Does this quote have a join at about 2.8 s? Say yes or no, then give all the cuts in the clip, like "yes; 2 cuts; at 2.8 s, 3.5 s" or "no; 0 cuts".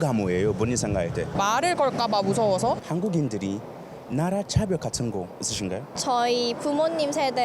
yes; 2 cuts; at 2.8 s, 5.9 s